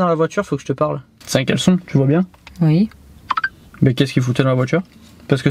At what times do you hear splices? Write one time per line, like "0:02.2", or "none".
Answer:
0:01.1